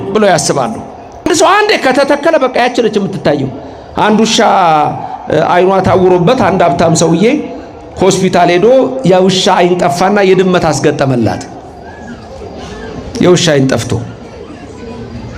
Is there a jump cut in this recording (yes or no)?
yes